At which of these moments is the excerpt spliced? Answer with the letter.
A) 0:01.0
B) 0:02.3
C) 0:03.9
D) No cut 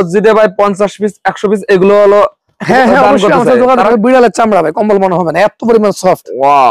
C